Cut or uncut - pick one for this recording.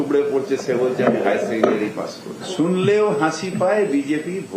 uncut